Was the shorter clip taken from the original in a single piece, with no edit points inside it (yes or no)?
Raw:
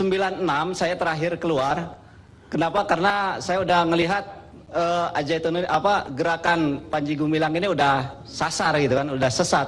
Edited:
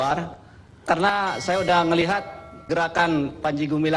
no